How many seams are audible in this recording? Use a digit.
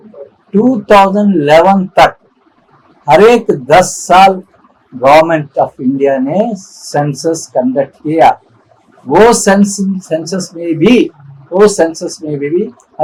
0